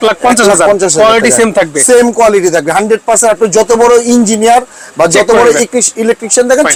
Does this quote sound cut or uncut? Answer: uncut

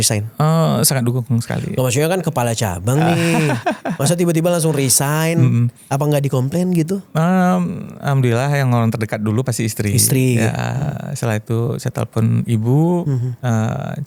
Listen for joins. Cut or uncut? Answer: uncut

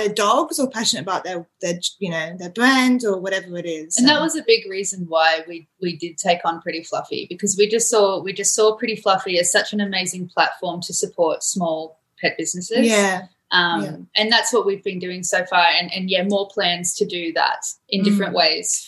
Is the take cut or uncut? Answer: uncut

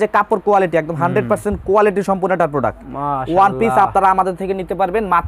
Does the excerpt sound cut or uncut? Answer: uncut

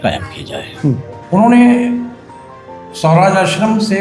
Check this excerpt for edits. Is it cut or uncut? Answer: cut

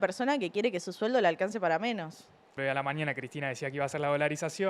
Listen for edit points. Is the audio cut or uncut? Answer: cut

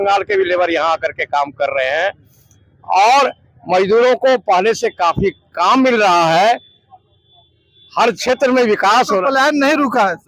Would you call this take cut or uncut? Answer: uncut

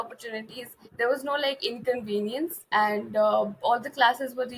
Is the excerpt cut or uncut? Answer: cut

